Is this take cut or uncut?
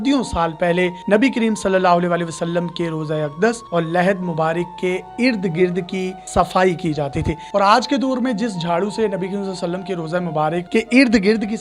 cut